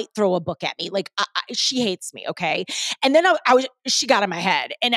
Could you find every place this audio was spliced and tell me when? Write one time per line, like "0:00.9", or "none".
none